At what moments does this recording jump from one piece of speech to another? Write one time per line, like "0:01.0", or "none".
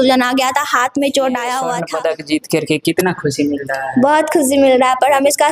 0:01.8